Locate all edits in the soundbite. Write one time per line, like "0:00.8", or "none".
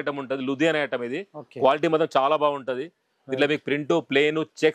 none